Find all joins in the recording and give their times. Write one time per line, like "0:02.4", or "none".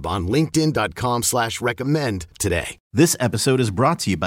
0:02.8